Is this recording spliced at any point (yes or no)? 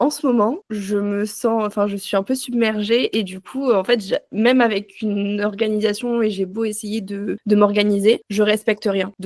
no